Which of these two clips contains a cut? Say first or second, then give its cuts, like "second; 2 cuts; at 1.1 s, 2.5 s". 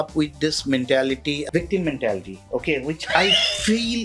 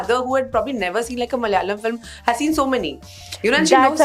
first; 1 cut; at 1.4 s